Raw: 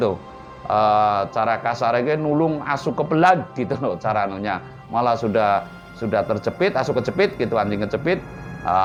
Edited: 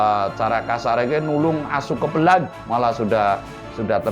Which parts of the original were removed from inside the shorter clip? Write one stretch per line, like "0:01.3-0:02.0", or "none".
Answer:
0:03.5-0:04.8